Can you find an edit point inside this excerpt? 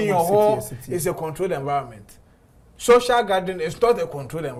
no; 0 cuts

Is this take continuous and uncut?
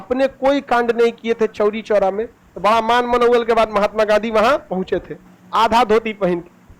no; 1 cut; at 2.4 s

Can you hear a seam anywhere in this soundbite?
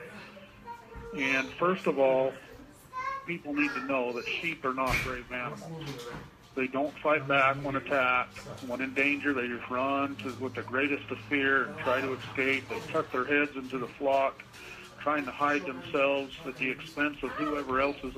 yes; 1 cut; at 3.6 s

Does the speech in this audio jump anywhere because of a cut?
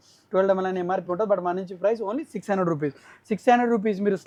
no; 0 cuts

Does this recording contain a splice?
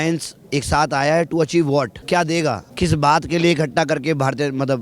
yes; 2 cuts; at 2.0 s, 2.7 s

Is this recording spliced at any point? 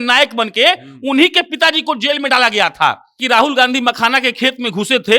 yes; 1 cut; at 3.1 s

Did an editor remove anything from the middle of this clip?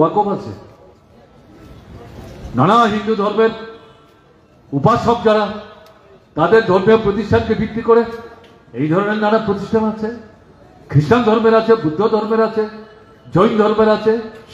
no; 0 cuts

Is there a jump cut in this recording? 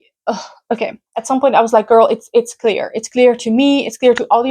yes; 1 cut; at 1.1 s

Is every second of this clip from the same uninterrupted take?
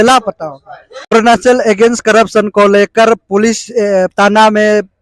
no; 1 cut; at 1.1 s

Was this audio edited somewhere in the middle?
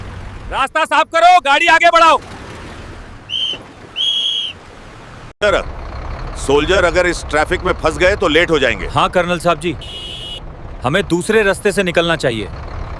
no; 0 cuts

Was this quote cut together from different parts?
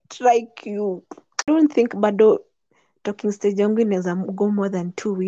yes; 1 cut; at 1.5 s

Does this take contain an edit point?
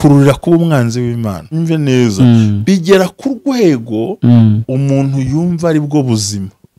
yes; 1 cut; at 1.5 s

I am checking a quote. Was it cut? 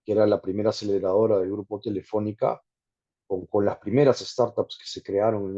no; 0 cuts

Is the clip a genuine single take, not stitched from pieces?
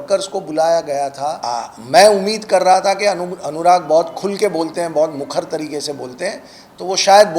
no; 1 cut; at 1.4 s

